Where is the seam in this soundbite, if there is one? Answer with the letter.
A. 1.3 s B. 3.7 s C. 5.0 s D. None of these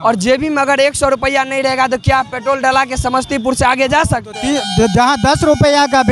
D